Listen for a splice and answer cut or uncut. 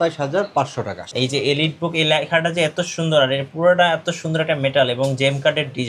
cut